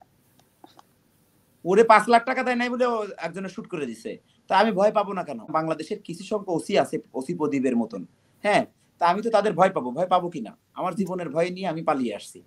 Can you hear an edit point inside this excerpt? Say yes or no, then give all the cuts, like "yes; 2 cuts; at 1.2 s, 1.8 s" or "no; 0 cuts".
yes; 1 cut; at 5.5 s